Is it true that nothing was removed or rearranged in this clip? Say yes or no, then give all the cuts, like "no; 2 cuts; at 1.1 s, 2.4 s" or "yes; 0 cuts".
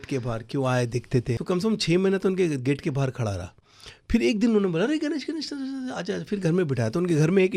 no; 1 cut; at 1.4 s